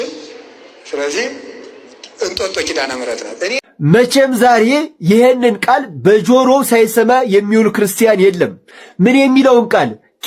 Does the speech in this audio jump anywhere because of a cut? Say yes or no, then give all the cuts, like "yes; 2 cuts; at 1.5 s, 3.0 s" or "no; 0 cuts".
yes; 1 cut; at 3.7 s